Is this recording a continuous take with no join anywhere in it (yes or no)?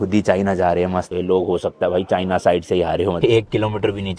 no